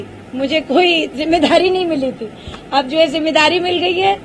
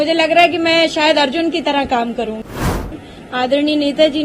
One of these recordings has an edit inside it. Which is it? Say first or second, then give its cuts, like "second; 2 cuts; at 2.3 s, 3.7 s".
second; 1 cut; at 2.7 s